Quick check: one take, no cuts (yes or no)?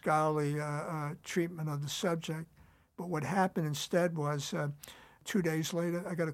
no